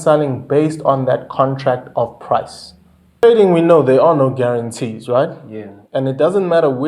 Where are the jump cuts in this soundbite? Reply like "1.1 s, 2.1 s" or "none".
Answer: 3.2 s